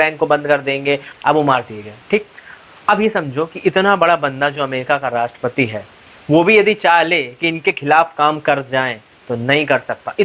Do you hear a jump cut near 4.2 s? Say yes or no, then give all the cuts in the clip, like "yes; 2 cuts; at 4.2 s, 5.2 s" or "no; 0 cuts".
no; 1 cut; at 1.1 s